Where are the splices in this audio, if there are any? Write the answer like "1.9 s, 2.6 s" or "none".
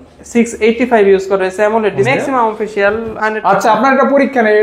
2.1 s, 3.1 s